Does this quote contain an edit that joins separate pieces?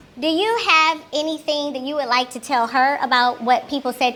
no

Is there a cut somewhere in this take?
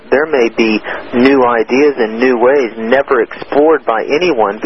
no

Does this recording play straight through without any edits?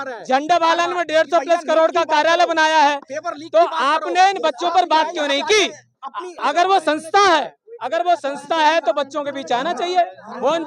no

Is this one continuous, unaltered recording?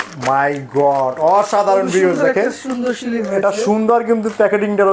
yes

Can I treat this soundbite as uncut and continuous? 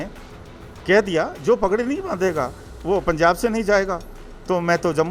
yes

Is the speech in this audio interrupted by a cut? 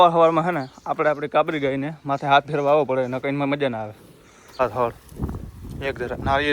yes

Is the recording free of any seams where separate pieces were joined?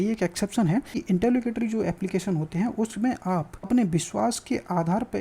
no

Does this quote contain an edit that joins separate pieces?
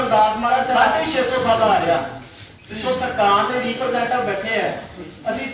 yes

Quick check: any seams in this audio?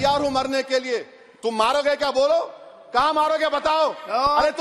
no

